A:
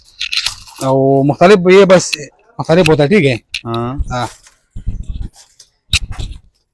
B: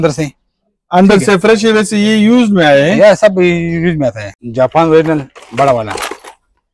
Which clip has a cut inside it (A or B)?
B